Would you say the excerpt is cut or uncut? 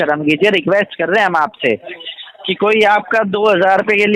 uncut